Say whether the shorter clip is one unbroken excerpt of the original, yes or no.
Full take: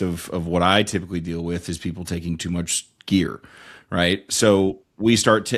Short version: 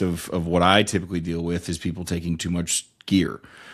yes